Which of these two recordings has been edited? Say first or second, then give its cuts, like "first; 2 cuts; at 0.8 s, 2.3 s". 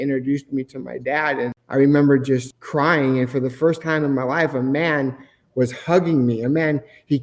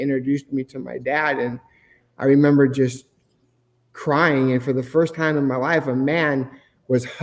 first; 2 cuts; at 1.6 s, 2.6 s